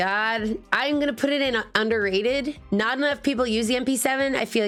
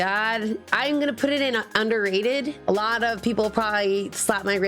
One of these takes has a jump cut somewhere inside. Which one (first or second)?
second